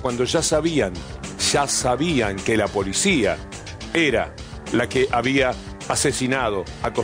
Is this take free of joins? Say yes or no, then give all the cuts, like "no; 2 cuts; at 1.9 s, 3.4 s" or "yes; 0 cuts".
yes; 0 cuts